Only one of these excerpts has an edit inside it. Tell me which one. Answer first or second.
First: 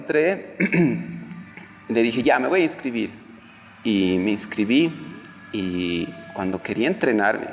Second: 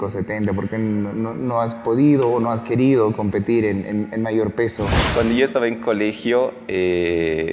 second